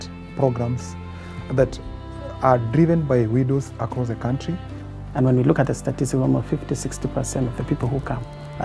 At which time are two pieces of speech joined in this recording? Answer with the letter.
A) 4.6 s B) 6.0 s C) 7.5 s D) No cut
A